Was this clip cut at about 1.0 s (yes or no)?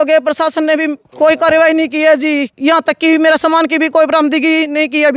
yes